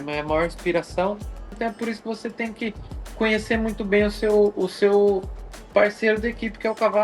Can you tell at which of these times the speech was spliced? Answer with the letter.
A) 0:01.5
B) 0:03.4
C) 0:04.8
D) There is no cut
A